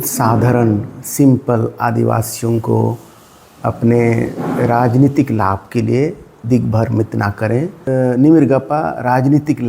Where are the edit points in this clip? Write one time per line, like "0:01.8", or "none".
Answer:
0:07.8